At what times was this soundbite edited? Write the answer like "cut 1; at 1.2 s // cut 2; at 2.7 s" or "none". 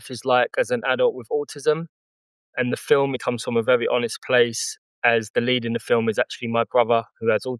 cut 1; at 3.2 s